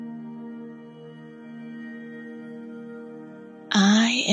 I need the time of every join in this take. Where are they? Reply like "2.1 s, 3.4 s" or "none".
none